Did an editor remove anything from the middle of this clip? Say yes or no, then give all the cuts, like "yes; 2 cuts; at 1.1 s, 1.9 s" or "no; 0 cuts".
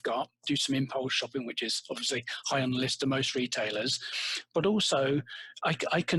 no; 0 cuts